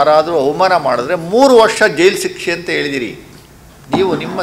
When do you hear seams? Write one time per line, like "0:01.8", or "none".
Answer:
none